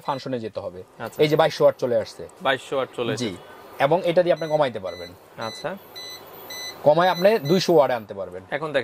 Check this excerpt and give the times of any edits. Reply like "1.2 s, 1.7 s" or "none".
none